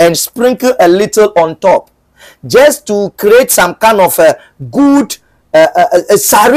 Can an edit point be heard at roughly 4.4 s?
no; 0 cuts

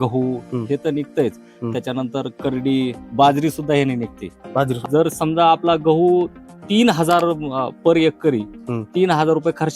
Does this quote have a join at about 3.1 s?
no; 1 cut; at 4.8 s

